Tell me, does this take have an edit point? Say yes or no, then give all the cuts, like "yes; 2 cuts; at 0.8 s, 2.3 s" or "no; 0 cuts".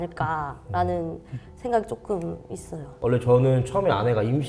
yes; 1 cut; at 2.9 s